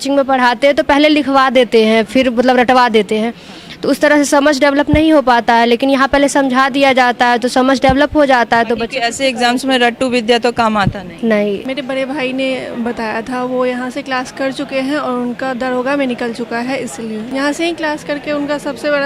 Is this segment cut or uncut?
cut